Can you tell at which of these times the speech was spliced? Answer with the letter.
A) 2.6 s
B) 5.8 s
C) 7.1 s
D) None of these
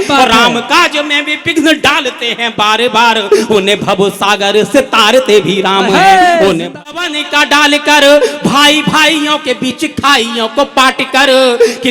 C